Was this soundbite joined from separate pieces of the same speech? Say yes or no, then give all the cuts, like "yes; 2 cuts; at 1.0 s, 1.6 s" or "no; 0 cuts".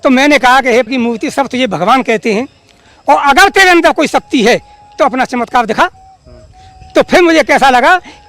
no; 0 cuts